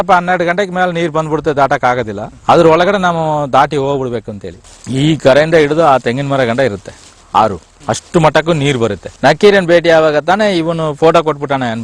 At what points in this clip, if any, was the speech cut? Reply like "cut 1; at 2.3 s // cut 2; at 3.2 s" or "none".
cut 1; at 4.6 s // cut 2; at 9.1 s